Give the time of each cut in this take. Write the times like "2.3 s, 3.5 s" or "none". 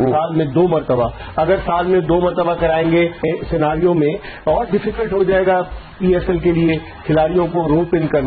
3.2 s